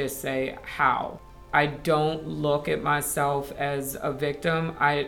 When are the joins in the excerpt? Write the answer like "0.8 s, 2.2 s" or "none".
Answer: 1.5 s